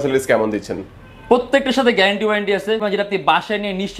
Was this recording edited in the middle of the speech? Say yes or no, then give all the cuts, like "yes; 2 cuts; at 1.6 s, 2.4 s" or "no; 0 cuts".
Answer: yes; 1 cut; at 2.8 s